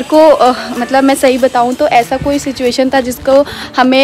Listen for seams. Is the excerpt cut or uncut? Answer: uncut